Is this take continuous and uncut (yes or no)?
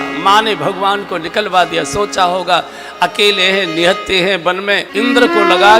no